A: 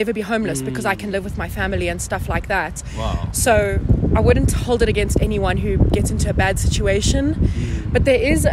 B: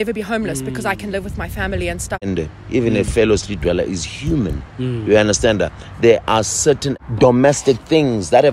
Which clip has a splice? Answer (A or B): B